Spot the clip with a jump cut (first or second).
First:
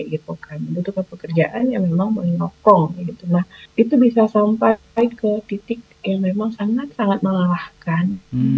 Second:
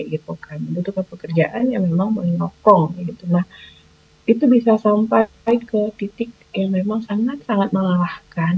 first